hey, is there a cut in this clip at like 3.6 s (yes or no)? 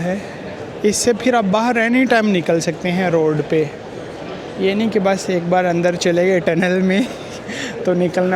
no